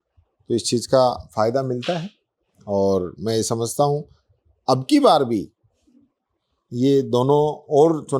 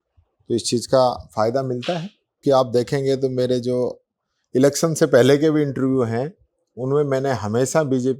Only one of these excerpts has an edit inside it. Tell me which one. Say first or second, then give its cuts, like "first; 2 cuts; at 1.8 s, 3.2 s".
second; 1 cut; at 2.4 s